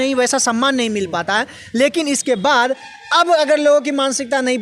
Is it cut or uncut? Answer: uncut